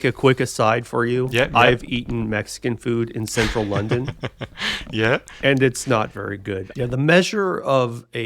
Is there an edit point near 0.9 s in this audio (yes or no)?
no